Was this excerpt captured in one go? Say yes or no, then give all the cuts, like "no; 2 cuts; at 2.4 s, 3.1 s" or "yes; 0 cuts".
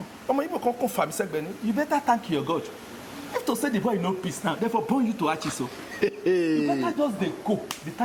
yes; 0 cuts